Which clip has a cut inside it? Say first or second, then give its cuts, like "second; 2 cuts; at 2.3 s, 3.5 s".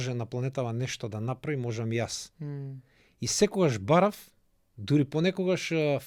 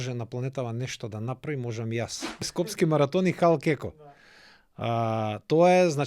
second; 1 cut; at 2.6 s